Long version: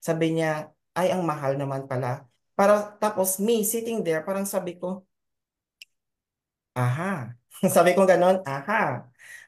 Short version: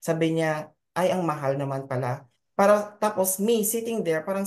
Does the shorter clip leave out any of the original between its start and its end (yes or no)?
no